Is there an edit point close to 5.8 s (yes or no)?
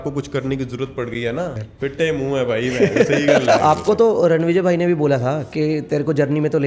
no